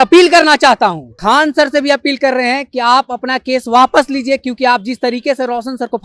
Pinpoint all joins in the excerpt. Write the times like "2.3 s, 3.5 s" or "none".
1.1 s